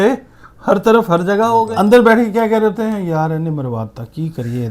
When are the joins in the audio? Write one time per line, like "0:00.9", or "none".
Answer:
0:01.7